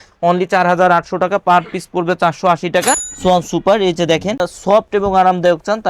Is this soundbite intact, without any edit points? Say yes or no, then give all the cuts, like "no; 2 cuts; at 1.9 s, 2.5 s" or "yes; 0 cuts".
no; 2 cuts; at 3.1 s, 4.5 s